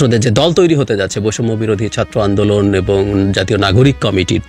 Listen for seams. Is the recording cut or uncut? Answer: uncut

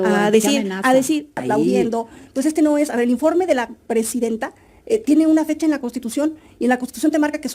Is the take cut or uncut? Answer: cut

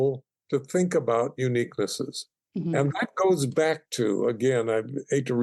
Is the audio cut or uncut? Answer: uncut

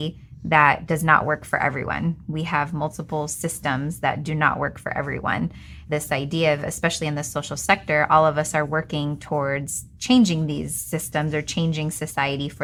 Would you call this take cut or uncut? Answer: uncut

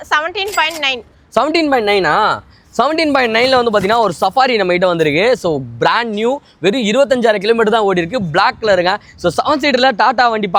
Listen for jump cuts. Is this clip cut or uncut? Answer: uncut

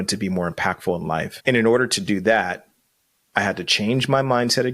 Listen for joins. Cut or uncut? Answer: cut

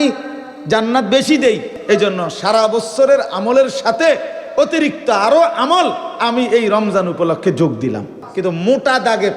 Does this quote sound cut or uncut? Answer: cut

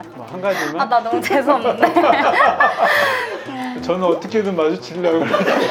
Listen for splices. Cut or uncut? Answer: uncut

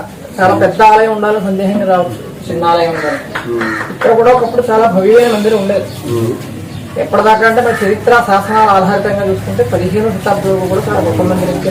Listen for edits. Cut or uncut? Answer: uncut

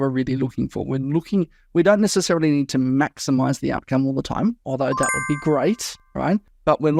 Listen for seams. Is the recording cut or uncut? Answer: uncut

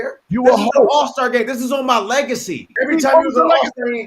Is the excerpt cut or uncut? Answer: cut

